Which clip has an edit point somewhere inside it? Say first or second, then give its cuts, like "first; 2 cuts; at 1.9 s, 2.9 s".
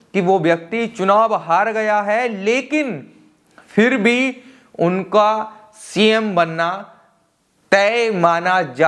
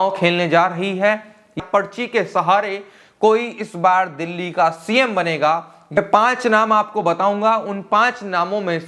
second; 2 cuts; at 1.6 s, 6.0 s